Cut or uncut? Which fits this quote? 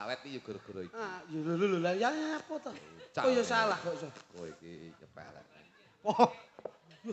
uncut